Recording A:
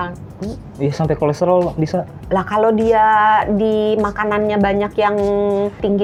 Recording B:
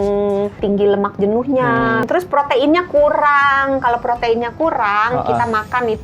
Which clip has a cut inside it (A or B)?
B